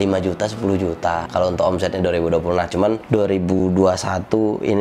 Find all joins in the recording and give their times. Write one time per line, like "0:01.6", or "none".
0:01.2
0:03.6